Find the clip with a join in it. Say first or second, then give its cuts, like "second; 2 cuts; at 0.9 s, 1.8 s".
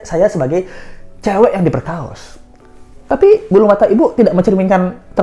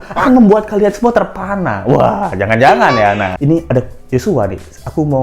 second; 1 cut; at 3.3 s